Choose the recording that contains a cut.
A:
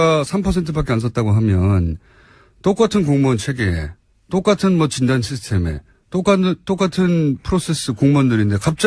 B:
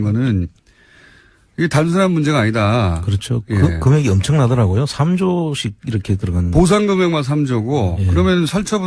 A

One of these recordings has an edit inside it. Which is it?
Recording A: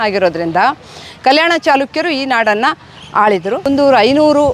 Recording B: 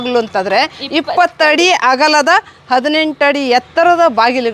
A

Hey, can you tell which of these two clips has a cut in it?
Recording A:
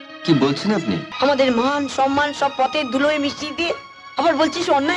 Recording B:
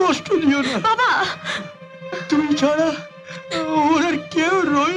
A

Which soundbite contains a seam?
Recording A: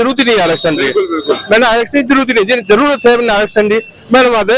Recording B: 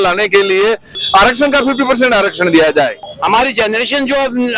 B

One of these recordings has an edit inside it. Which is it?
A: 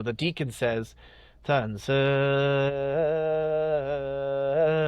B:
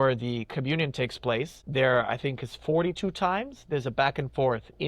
B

